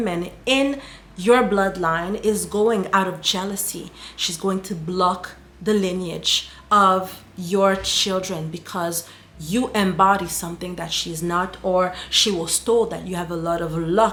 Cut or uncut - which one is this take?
uncut